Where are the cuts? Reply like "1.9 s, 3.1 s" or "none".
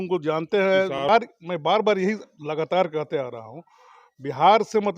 1.0 s